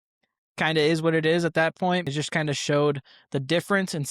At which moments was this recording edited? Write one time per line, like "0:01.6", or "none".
0:02.1